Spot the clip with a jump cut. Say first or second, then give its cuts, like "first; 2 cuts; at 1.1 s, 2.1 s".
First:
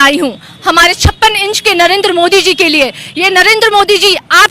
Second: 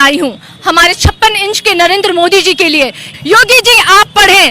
second; 1 cut; at 3.1 s